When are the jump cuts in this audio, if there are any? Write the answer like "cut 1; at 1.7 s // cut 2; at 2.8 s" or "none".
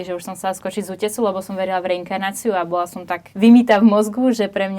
cut 1; at 3.2 s

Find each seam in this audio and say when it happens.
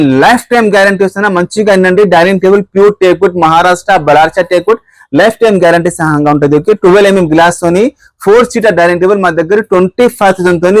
none

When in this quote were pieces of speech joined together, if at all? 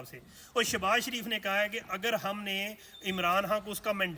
none

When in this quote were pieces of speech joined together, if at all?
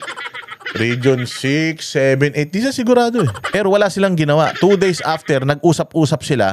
cut 1; at 3.6 s

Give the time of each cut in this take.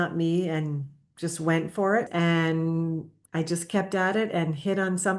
cut 1; at 2.1 s

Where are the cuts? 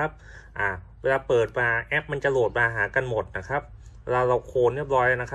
none

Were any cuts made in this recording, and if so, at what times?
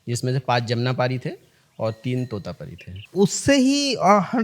cut 1; at 3.0 s

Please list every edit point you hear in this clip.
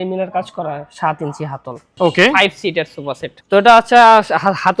cut 1; at 1.8 s // cut 2; at 3.3 s

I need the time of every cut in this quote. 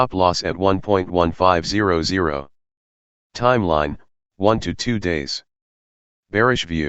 cut 1; at 1.2 s

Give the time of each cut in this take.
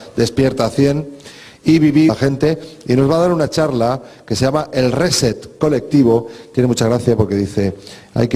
none

